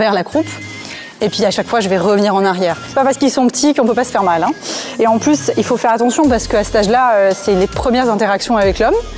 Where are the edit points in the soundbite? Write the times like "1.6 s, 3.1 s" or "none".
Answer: 2.8 s